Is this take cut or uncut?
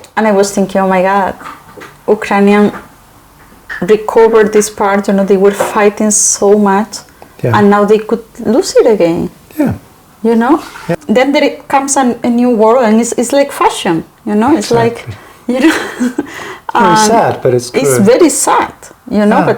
cut